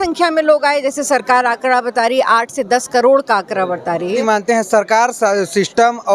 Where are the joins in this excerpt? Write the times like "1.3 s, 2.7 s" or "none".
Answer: 4.2 s